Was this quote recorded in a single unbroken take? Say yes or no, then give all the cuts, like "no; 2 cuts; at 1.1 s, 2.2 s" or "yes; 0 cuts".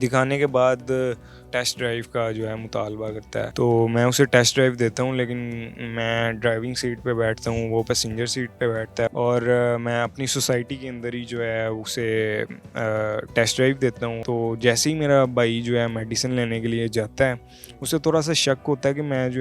no; 4 cuts; at 1.4 s, 3.5 s, 9.1 s, 14.2 s